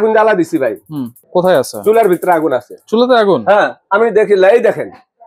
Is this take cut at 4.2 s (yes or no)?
no